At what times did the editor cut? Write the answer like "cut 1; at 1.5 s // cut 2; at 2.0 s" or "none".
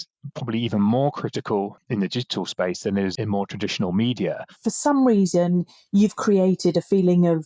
cut 1; at 1.8 s // cut 2; at 3.1 s // cut 3; at 4.5 s

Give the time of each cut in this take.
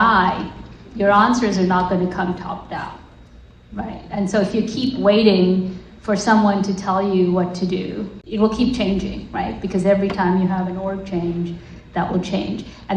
cut 1; at 8.2 s

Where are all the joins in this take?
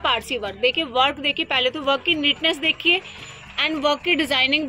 none

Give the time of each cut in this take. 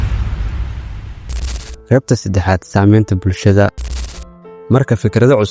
cut 1; at 1.0 s

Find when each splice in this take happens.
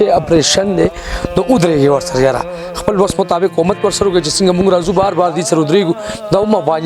none

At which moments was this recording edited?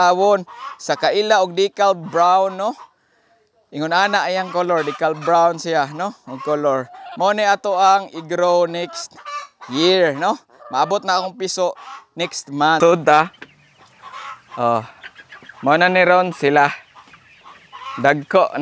cut 1; at 12.8 s

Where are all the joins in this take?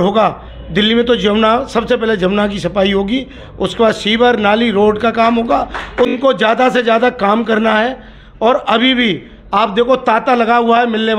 cut 1; at 6.1 s

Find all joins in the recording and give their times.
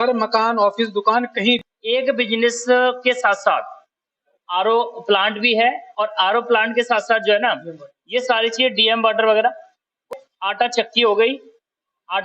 cut 1; at 1.6 s // cut 2; at 10.1 s

